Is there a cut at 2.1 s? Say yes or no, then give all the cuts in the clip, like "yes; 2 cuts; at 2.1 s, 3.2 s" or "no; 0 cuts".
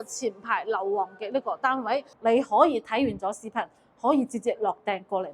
yes; 1 cut; at 2.1 s